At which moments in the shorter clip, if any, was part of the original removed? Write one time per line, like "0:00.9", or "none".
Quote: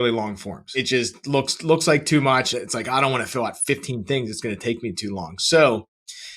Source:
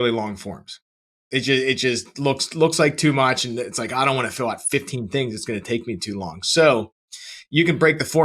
0:00.8
0:02.5